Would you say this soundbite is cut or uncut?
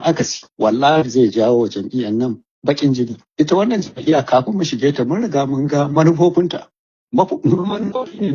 uncut